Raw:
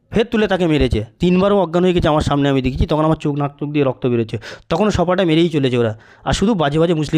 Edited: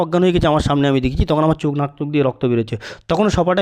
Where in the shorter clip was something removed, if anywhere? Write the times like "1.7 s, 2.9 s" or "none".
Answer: none

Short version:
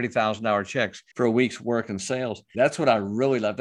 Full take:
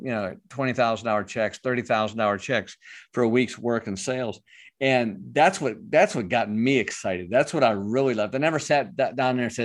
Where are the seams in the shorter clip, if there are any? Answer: 1.0 s, 2.5 s

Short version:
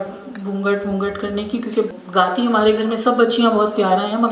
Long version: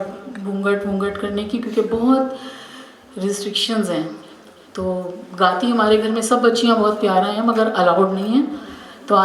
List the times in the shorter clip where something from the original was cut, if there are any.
1.9 s

